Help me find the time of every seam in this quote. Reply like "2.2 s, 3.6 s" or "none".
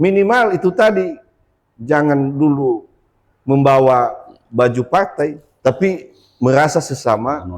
5.5 s